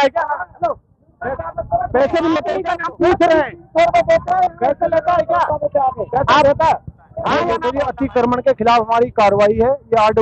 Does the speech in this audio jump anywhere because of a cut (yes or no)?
yes